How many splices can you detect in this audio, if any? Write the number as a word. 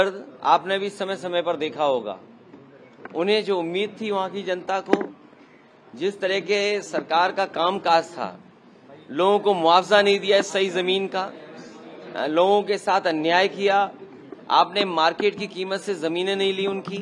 zero